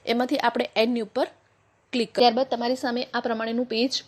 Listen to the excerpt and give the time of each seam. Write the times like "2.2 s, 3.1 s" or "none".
2.0 s